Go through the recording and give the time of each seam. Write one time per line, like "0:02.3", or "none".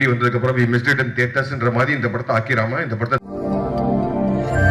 0:03.2